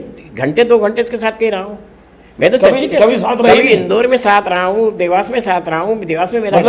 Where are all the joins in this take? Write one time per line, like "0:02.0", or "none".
none